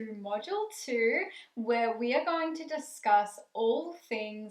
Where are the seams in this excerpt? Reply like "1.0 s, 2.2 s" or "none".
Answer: none